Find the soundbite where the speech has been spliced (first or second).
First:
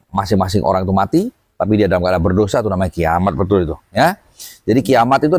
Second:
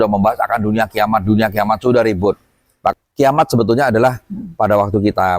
second